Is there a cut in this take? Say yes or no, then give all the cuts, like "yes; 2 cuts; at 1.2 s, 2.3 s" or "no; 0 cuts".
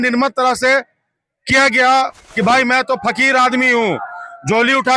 yes; 1 cut; at 2.2 s